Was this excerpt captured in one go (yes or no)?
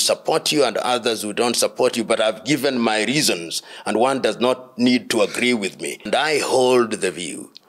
no